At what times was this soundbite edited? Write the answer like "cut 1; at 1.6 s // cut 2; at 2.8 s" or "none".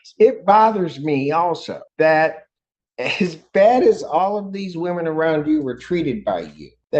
none

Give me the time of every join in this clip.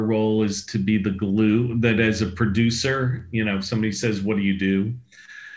none

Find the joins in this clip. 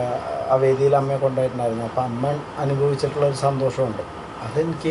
none

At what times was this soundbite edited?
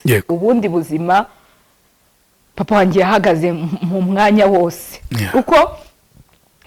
none

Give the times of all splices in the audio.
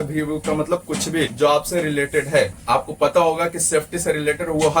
cut 1; at 1.3 s // cut 2; at 2.6 s

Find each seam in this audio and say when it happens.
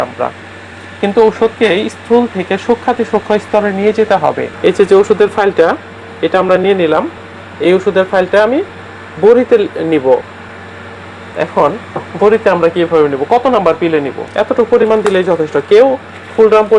cut 1; at 4.5 s // cut 2; at 14.2 s

